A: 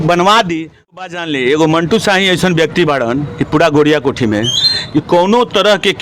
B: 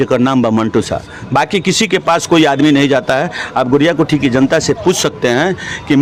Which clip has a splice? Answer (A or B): A